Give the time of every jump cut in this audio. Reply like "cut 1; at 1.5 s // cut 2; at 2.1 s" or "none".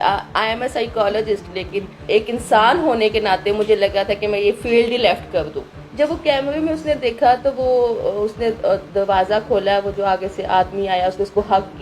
cut 1; at 2.1 s // cut 2; at 5.7 s